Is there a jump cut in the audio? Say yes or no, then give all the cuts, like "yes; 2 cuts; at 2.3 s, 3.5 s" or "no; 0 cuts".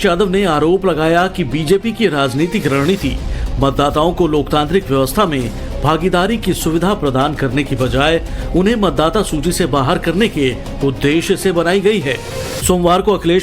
yes; 1 cut; at 2.3 s